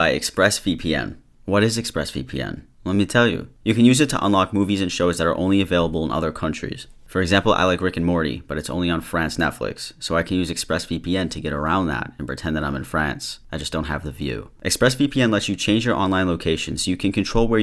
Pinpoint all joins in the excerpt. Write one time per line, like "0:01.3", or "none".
none